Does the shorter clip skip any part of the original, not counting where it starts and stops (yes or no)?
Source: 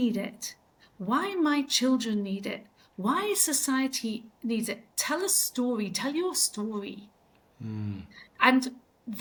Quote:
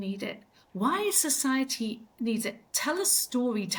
no